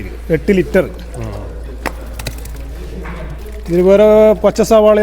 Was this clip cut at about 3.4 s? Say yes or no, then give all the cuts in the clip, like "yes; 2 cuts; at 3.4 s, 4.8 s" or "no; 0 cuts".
yes; 1 cut; at 3.4 s